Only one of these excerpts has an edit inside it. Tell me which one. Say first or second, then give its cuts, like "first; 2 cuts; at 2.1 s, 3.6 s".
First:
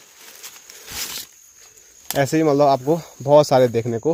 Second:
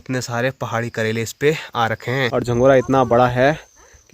second; 1 cut; at 2.3 s